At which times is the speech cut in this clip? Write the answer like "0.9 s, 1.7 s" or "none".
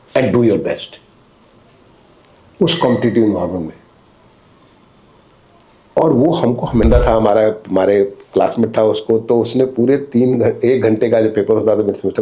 6.8 s